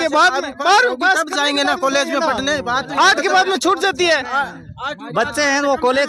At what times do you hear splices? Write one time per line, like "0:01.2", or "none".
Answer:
none